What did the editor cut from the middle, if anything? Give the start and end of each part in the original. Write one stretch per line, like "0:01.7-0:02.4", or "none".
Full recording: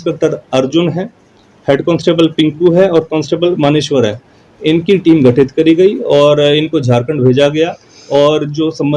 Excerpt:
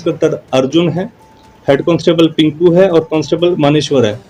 none